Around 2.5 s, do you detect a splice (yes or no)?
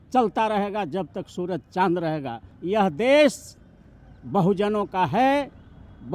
yes